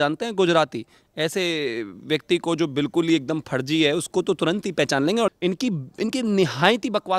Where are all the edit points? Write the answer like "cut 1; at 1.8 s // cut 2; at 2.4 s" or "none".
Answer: cut 1; at 5.3 s